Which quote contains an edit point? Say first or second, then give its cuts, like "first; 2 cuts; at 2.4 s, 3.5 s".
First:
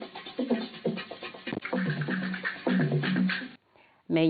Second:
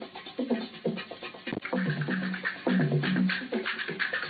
second; 1 cut; at 3.4 s